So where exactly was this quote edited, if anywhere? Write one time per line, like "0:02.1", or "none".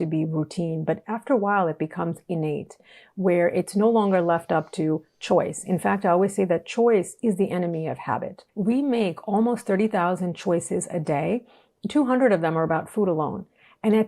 0:08.4